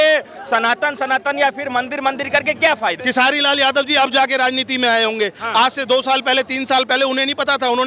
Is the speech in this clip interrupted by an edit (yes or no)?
yes